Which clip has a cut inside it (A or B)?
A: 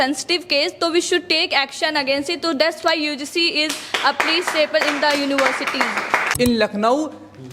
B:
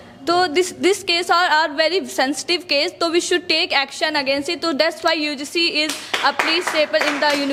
A